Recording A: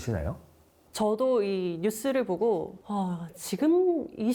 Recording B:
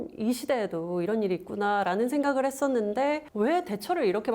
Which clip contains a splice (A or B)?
B